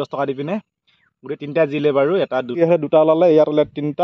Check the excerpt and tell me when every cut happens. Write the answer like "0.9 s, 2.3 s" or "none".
2.5 s